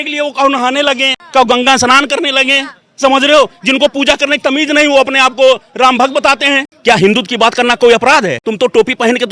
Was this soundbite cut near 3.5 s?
no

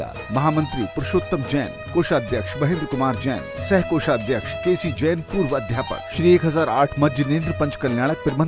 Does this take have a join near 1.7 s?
no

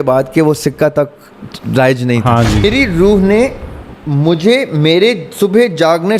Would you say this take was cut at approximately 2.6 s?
yes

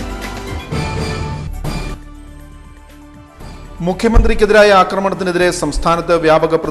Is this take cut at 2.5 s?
no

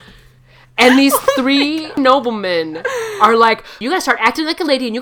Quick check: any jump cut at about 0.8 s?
yes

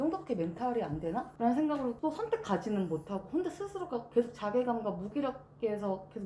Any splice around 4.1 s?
no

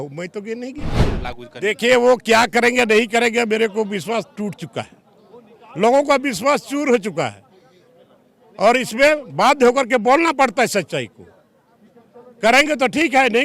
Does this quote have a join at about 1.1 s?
yes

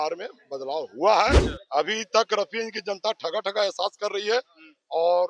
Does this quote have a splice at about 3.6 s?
no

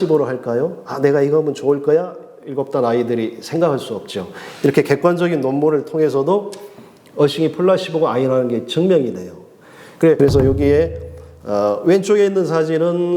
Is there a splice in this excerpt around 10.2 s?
yes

